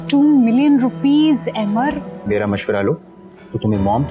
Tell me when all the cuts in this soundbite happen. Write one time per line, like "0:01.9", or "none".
0:02.1